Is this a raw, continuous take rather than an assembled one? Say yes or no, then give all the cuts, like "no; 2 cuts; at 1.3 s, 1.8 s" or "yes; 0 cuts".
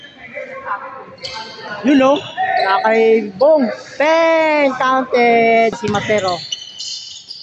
no; 1 cut; at 5.8 s